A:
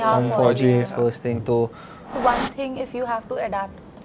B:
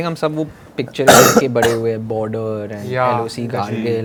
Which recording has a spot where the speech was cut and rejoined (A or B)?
A